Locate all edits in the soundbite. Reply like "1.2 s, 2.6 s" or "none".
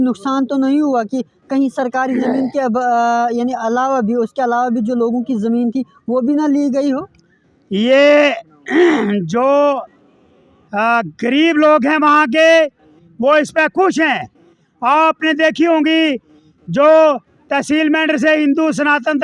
none